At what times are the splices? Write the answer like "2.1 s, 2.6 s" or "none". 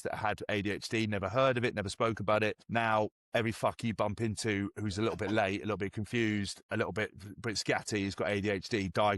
2.6 s